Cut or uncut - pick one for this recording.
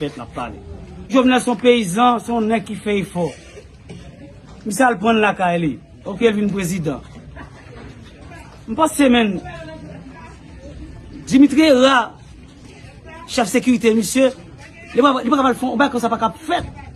cut